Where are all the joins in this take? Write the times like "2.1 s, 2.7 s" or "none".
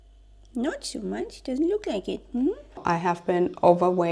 2.8 s